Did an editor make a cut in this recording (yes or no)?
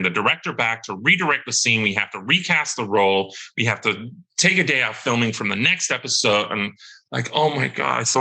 no